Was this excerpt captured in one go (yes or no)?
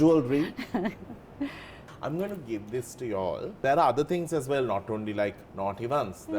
no